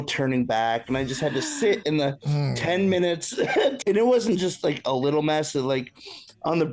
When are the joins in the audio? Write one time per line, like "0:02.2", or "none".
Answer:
0:03.8